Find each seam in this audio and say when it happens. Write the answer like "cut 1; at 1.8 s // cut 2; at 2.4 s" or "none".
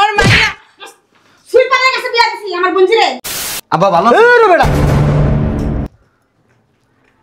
cut 1; at 3.3 s